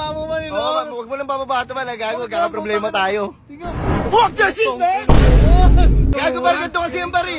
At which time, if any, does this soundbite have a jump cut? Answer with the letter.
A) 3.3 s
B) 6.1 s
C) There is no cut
B